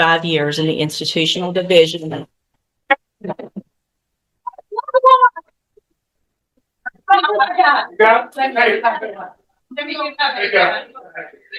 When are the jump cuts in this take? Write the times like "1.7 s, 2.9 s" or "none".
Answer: none